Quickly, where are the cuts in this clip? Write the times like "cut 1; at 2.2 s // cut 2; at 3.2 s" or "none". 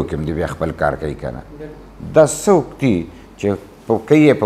none